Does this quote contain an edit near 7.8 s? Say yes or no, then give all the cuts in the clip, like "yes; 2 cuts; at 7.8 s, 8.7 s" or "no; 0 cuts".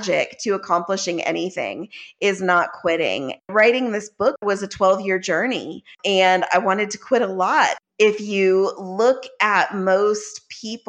yes; 4 cuts; at 3.5 s, 4.4 s, 5.9 s, 7.8 s